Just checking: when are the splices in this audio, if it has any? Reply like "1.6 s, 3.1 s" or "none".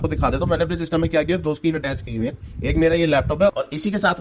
none